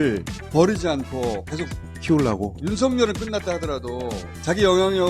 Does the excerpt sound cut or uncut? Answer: uncut